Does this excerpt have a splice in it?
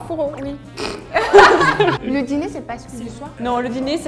yes; 1 cut; at 2.0 s

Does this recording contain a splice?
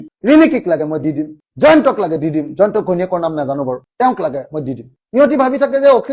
yes; 1 cut; at 4.9 s

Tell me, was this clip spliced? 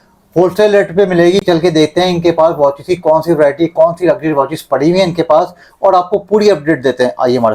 no; 0 cuts

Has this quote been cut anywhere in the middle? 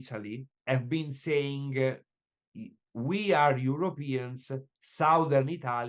no; 0 cuts

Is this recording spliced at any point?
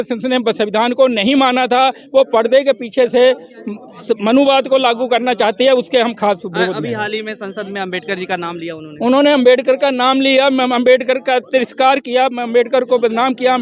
no; 0 cuts

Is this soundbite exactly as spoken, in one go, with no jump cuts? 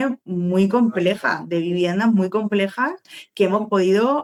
yes; 0 cuts

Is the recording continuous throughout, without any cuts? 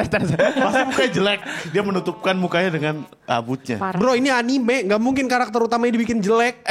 yes; 0 cuts

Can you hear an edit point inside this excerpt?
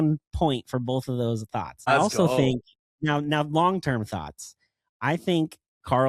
yes; 1 cut; at 1.9 s

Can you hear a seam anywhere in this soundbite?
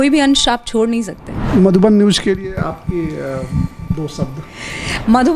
yes; 1 cut; at 1.5 s

